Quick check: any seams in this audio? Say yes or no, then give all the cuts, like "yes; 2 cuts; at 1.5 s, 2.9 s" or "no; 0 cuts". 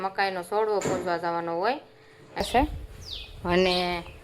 yes; 1 cut; at 2.4 s